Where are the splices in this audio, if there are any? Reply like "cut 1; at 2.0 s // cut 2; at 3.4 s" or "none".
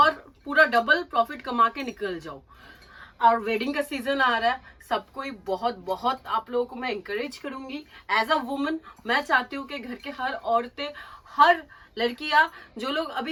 none